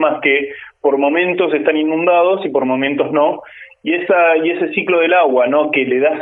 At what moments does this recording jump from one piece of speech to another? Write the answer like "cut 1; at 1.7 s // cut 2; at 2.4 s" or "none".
none